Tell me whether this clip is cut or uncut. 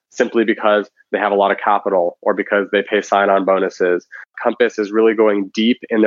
cut